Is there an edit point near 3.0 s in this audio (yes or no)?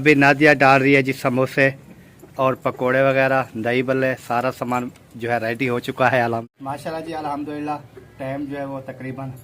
no